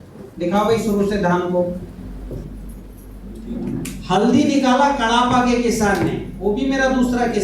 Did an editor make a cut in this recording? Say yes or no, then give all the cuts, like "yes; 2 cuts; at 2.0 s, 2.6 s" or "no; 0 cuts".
yes; 1 cut; at 1.9 s